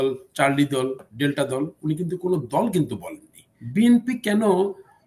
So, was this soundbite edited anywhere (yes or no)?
yes